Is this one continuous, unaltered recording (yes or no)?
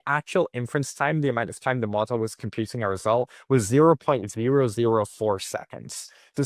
yes